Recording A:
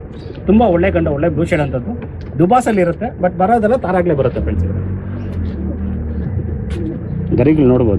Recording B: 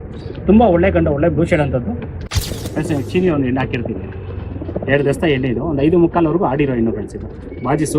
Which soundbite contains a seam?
B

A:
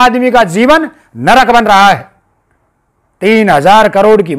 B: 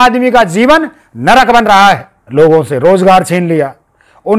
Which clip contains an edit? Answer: B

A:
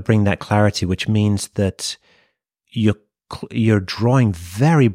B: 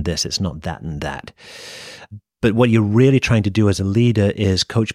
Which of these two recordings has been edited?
B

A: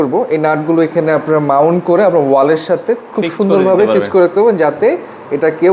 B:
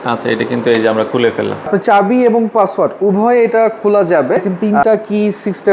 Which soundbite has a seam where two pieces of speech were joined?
B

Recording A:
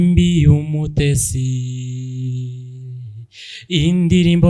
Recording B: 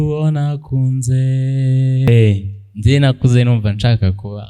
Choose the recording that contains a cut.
B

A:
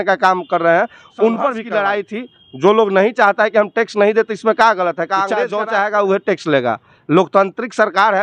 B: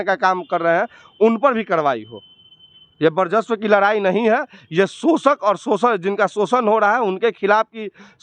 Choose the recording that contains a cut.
A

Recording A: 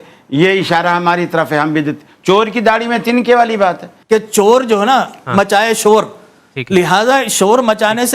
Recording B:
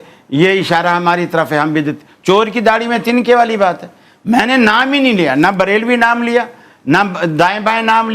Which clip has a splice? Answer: A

